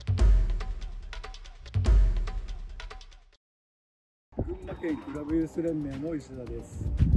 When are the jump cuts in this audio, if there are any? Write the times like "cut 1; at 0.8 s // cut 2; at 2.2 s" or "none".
cut 1; at 1.7 s // cut 2; at 3.0 s